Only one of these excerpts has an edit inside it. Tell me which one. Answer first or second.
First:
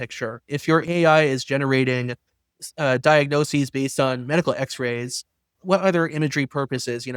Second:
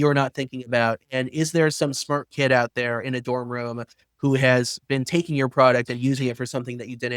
first